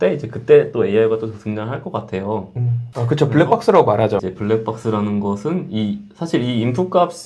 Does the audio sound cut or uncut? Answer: cut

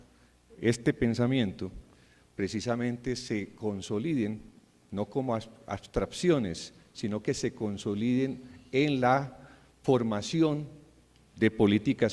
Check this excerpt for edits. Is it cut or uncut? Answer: uncut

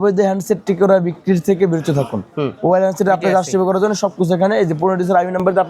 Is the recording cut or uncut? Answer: uncut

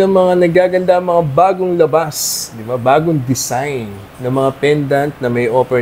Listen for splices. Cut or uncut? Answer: uncut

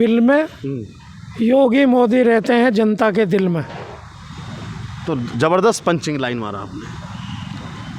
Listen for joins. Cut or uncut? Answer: uncut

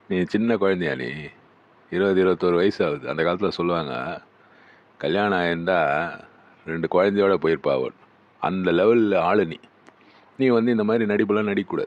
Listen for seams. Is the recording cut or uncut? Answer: uncut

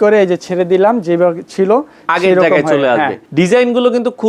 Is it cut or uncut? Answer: cut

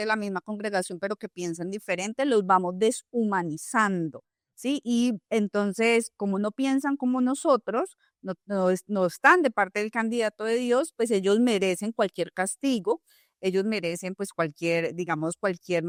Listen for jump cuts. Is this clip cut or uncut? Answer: uncut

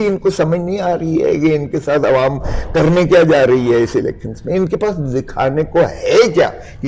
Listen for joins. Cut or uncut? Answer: uncut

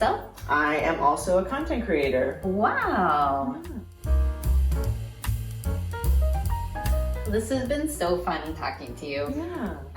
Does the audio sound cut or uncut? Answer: cut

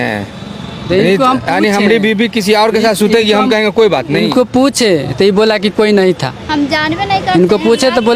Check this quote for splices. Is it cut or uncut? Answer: uncut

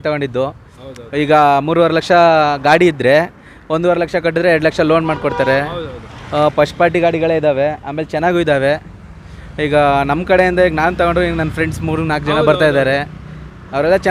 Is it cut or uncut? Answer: uncut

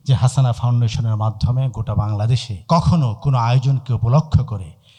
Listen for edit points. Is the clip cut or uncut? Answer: uncut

